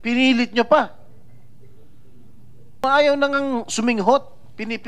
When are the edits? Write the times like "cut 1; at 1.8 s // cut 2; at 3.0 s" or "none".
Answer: cut 1; at 2.8 s